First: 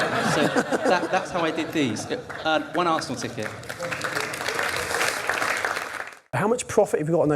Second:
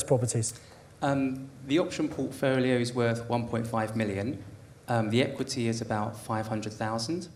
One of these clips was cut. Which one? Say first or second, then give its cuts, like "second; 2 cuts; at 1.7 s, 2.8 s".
first; 1 cut; at 6.3 s